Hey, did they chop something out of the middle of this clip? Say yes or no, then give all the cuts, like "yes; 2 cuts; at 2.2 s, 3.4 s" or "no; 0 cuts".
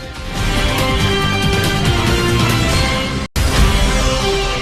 yes; 1 cut; at 3.3 s